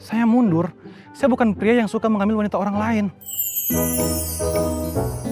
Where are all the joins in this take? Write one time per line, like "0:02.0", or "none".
none